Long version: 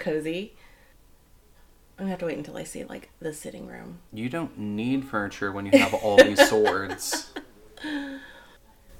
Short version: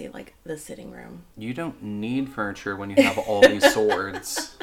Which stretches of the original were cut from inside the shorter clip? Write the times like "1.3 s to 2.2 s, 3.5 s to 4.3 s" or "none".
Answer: none